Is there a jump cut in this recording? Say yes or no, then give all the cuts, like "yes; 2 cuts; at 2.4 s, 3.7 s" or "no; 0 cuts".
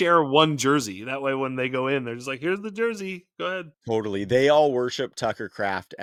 no; 0 cuts